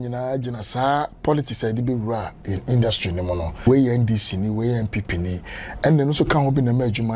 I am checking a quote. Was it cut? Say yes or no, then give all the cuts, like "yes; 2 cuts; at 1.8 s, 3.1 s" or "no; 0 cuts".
yes; 1 cut; at 3.7 s